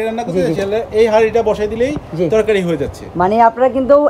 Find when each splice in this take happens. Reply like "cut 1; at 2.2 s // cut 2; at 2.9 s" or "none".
none